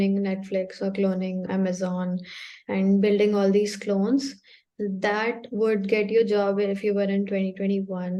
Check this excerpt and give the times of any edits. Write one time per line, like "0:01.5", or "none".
none

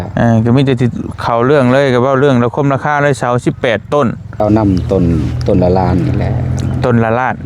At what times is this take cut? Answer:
0:04.4

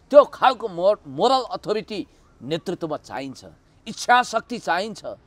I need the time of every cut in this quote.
none

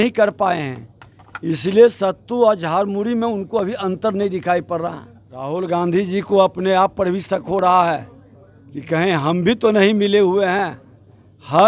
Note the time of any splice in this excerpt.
0:05.5

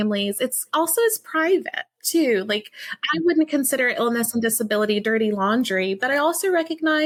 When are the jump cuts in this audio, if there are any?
none

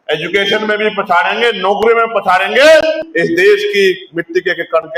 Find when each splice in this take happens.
0:03.1

